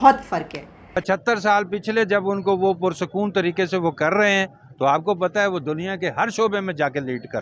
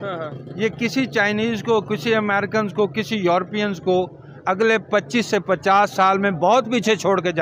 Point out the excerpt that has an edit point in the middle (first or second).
first